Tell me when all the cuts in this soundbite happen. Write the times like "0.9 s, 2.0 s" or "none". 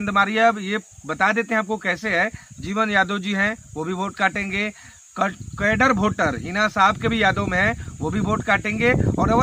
none